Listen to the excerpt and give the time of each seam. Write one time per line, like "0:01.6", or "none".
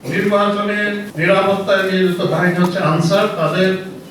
0:01.1